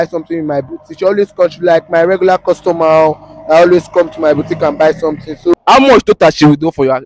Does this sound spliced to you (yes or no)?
yes